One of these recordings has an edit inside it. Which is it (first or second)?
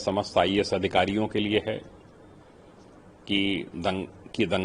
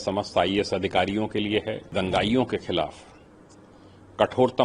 second